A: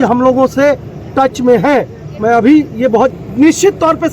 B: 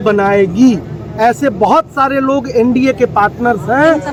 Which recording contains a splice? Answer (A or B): A